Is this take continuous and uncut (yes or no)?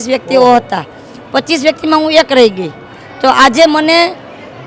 yes